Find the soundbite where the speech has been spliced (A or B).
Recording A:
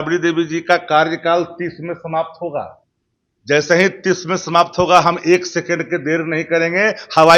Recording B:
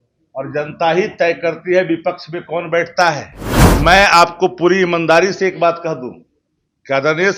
B